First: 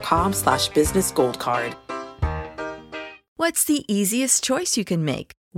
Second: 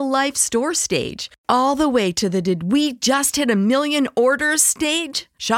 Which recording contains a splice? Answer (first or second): first